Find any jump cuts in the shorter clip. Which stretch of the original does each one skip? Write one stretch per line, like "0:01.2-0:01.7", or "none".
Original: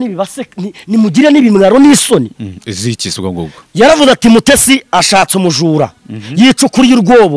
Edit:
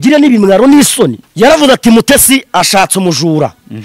0:02.4-0:03.6